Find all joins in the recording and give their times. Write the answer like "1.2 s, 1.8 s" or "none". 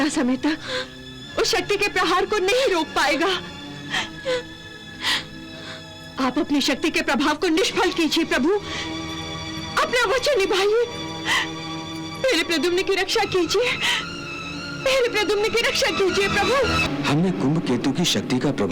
16.8 s